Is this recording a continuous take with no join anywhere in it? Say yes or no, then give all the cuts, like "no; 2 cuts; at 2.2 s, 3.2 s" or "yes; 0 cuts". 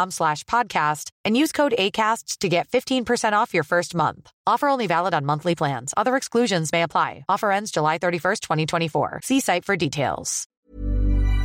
no; 1 cut; at 10.6 s